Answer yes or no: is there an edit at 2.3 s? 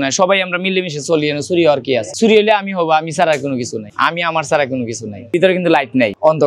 no